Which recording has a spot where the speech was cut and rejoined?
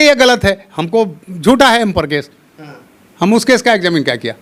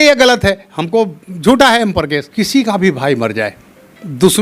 second; 1 cut; at 2.3 s

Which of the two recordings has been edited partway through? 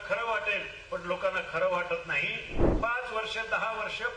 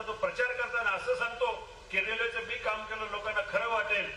first; 1 cut; at 2.6 s

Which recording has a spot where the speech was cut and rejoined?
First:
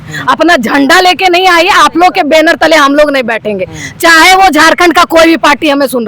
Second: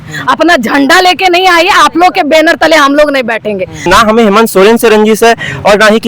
second; 1 cut; at 3.9 s

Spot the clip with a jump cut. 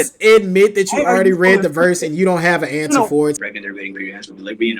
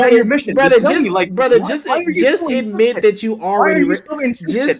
first; 1 cut; at 3.4 s

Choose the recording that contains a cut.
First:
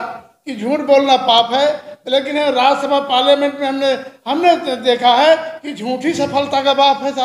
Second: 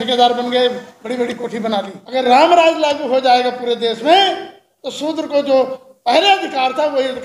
second; 1 cut; at 2.0 s

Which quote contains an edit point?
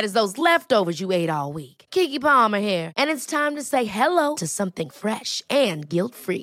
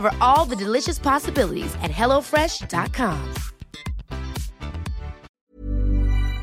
second; 1 cut; at 5.3 s

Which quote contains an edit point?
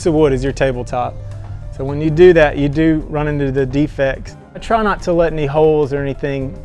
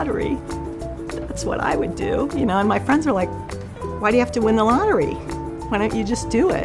first; 1 cut; at 4.6 s

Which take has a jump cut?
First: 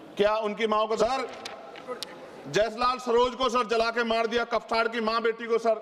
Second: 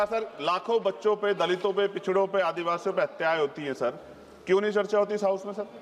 first; 1 cut; at 1.0 s

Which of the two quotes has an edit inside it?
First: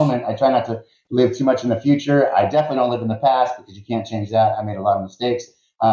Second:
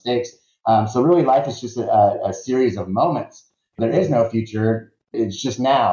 second; 2 cuts; at 3.7 s, 5.1 s

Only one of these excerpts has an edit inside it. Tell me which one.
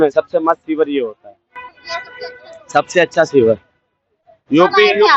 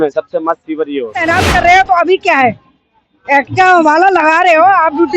second; 1 cut; at 1.2 s

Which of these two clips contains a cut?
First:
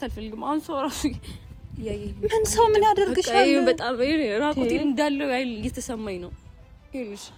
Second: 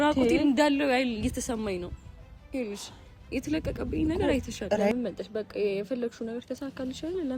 second; 1 cut; at 4.9 s

